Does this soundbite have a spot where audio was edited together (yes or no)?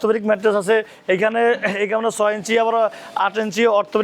no